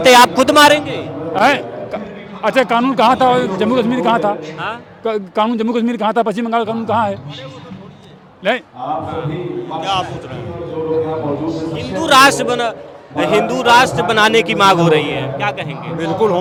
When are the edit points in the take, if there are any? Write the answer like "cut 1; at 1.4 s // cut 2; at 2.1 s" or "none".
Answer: none